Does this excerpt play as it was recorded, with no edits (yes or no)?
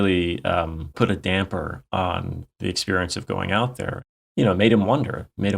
no